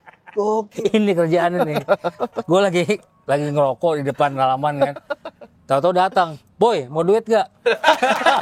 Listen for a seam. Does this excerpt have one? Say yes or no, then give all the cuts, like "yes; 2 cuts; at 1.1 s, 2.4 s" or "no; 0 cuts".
no; 0 cuts